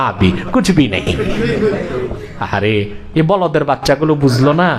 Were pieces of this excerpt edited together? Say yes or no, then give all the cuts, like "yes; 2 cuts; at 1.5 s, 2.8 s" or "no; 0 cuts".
yes; 1 cut; at 2.3 s